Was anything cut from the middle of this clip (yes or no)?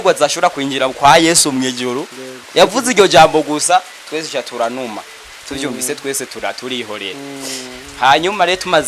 no